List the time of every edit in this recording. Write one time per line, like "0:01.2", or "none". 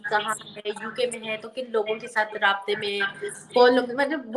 none